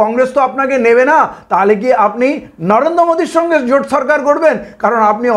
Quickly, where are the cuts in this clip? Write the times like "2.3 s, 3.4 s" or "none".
none